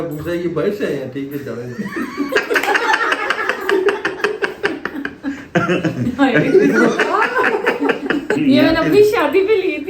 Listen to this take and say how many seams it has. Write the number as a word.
one